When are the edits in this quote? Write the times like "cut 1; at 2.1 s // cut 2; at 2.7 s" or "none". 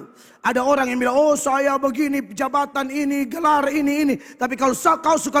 none